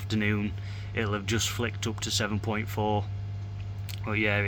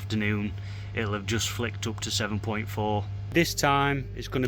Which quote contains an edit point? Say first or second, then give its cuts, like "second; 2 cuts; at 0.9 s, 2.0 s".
second; 1 cut; at 3.2 s